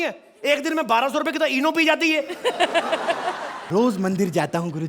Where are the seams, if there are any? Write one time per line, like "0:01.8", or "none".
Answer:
0:03.5